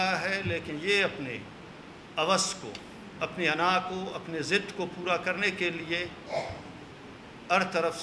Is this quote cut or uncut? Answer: uncut